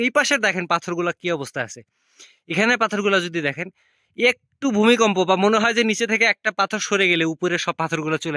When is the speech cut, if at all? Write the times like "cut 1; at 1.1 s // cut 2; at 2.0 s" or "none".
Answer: none